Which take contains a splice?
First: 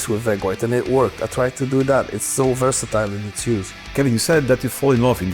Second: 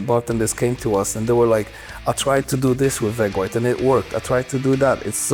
first; 1 cut; at 3.8 s

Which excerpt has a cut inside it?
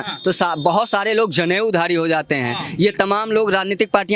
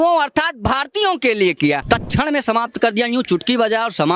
second; 1 cut; at 1.8 s

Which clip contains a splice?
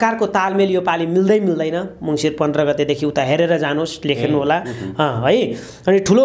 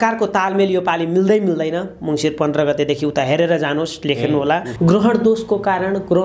second; 1 cut; at 4.7 s

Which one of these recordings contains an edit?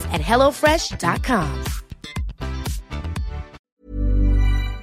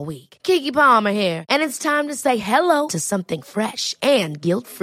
first; 1 cut; at 3.6 s

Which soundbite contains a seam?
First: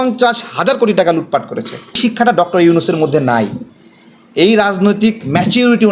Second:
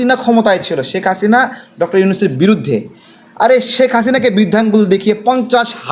first; 1 cut; at 1.9 s

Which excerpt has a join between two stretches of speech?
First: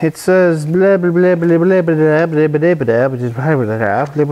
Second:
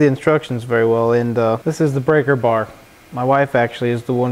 second; 1 cut; at 1.6 s

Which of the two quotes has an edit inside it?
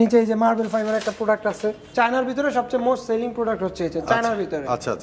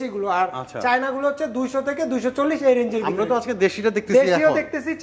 first; 1 cut; at 1.8 s

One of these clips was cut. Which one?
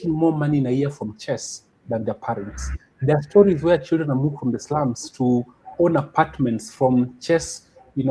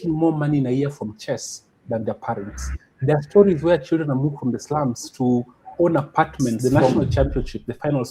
second; 1 cut; at 6.6 s

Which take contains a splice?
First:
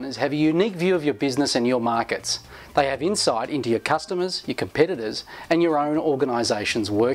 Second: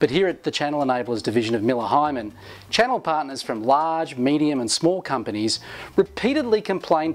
first; 1 cut; at 1.0 s

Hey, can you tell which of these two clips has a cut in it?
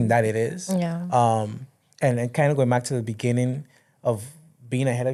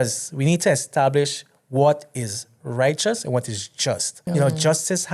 second; 1 cut; at 4.1 s

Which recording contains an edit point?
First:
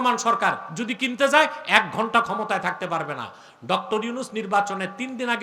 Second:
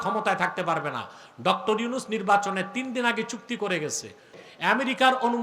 second; 1 cut; at 4.3 s

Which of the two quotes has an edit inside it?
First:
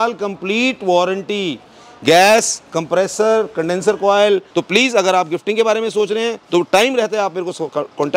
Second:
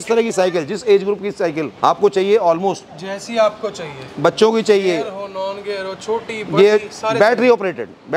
first; 1 cut; at 4.5 s

